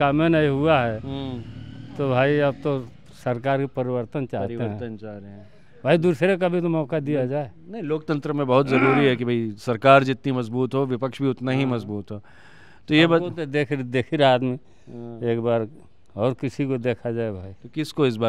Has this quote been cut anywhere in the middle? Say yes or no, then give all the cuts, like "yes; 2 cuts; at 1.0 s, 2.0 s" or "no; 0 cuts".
no; 0 cuts